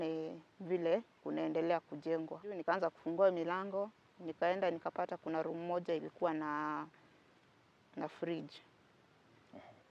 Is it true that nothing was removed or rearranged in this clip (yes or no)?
no